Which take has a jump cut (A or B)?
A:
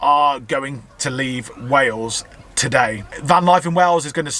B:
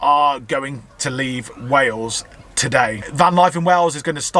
B